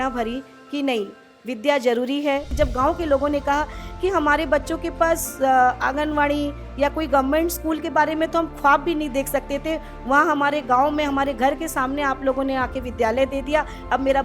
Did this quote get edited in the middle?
yes; 1 cut; at 2.5 s

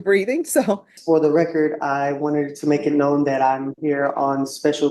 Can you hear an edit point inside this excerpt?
yes; 1 cut; at 0.9 s

